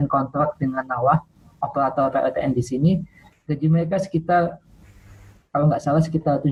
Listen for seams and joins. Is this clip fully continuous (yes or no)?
yes